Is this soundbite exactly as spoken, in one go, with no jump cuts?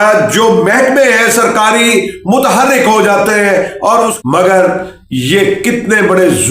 no; 1 cut; at 4.2 s

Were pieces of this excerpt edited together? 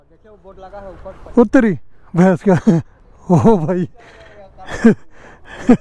no; 0 cuts

